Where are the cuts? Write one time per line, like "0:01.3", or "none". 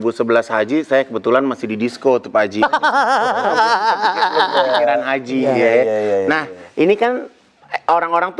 none

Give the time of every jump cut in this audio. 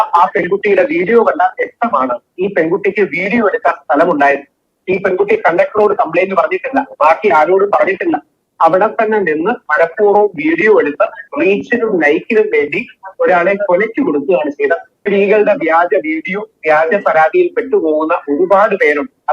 0:14.9

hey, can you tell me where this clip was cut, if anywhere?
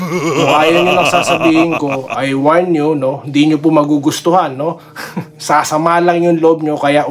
none

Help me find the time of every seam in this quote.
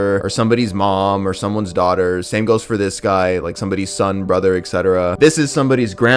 none

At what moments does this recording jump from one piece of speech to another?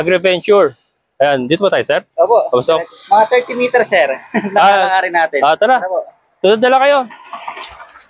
none

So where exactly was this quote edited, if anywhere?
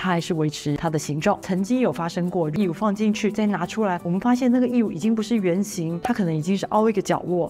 0:01.4

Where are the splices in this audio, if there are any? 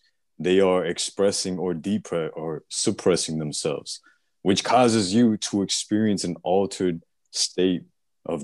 none

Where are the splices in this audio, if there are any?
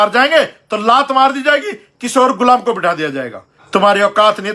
0:03.6

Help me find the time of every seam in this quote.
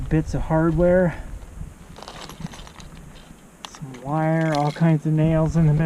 none

